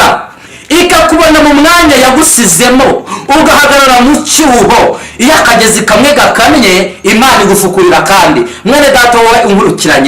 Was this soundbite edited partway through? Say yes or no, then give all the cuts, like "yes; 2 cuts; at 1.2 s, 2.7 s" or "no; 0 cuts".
no; 0 cuts